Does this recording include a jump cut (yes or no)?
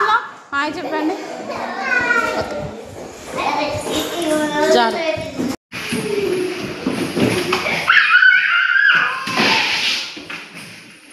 yes